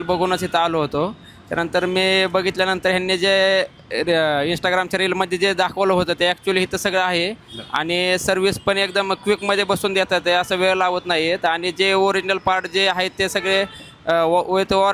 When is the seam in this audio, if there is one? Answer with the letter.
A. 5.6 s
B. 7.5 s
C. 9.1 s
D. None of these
D